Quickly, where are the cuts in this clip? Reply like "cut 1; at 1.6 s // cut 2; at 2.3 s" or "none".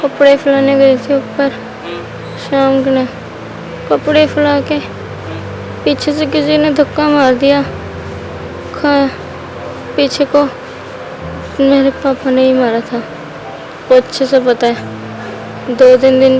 none